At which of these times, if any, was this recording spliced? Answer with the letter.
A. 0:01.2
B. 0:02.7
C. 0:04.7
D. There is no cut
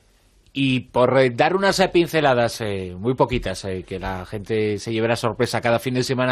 B